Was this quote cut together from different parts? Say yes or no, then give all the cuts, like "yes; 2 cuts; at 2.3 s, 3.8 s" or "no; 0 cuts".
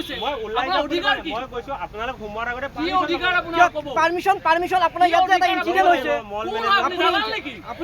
no; 0 cuts